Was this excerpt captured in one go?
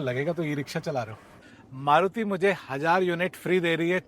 no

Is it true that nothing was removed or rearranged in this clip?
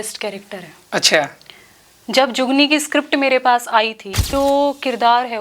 no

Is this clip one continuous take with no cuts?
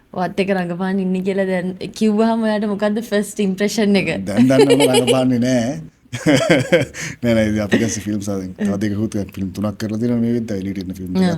yes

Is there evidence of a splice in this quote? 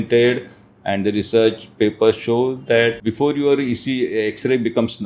yes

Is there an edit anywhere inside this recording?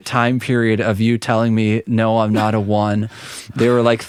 no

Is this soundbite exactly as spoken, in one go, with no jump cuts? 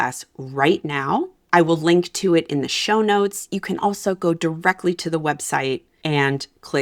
no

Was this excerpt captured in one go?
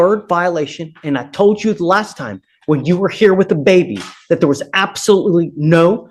yes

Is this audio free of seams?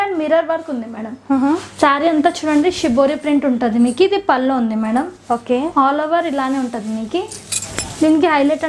yes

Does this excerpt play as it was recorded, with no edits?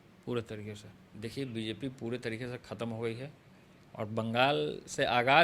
no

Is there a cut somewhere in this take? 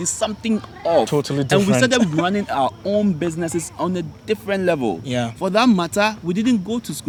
no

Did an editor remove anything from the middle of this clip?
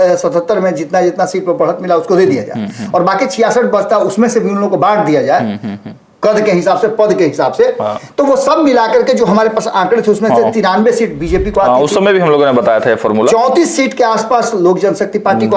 no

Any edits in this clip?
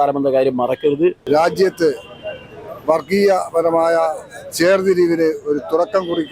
yes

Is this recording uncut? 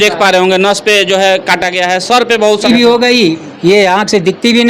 no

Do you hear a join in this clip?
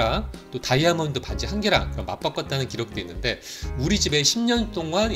yes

